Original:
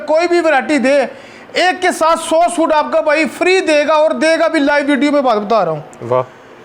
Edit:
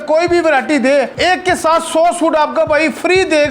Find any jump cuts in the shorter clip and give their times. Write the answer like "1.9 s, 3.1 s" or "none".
1.1 s